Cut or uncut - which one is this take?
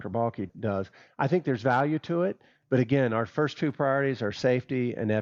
uncut